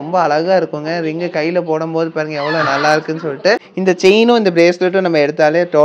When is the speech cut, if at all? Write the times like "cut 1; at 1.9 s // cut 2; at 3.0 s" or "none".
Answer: cut 1; at 3.7 s